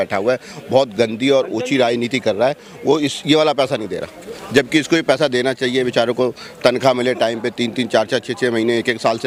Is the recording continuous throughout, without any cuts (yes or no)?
yes